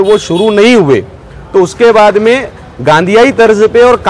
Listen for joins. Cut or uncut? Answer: uncut